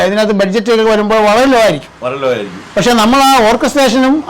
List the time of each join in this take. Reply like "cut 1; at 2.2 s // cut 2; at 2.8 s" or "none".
none